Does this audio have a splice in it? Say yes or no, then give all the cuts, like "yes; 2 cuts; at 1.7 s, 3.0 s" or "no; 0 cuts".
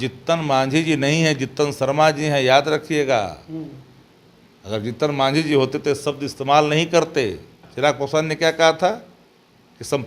yes; 1 cut; at 7.7 s